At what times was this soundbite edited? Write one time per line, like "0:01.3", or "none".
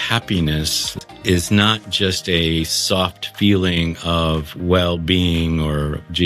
0:01.0